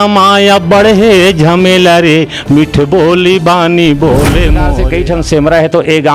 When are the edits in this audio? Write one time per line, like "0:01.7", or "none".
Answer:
0:04.7